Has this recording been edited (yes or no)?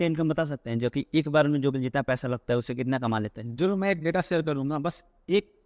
no